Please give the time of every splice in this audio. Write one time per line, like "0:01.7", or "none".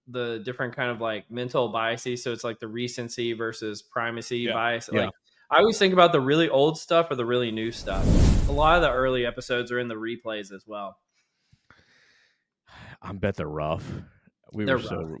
0:08.3